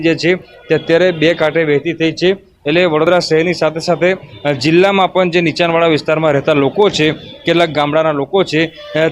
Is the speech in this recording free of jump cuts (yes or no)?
no